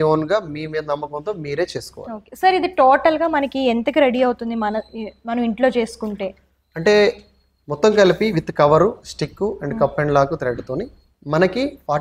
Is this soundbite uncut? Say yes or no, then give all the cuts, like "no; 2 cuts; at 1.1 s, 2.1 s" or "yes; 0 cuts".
yes; 0 cuts